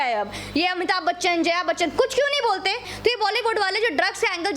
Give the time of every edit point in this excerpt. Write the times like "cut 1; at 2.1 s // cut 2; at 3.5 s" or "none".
cut 1; at 2.9 s